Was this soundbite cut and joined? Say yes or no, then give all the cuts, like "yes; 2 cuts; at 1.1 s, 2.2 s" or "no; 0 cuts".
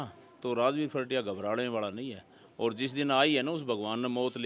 no; 0 cuts